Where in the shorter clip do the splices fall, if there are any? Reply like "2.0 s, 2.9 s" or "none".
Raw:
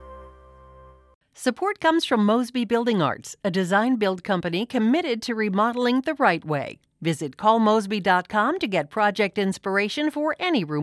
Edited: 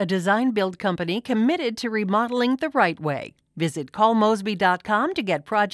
none

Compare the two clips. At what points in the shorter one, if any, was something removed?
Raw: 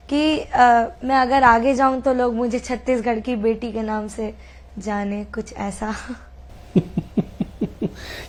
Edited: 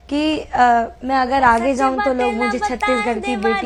none

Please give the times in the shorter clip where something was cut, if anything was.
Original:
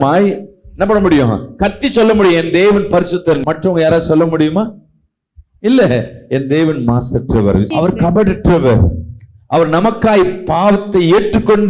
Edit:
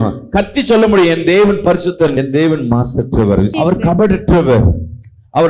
2.1 s

